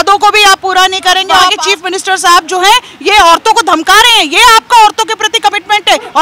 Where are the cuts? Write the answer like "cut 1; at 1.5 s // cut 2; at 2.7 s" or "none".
cut 1; at 1.5 s